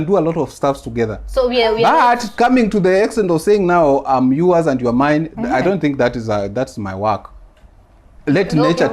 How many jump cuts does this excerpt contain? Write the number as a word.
zero